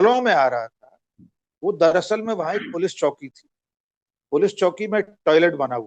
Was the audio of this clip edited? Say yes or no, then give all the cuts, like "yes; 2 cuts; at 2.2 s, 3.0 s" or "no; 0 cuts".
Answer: no; 0 cuts